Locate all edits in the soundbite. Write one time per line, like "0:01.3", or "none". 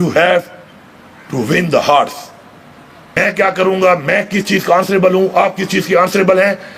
0:03.1